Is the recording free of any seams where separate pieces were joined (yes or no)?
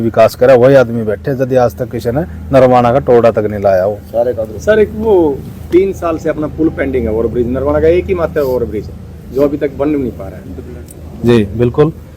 no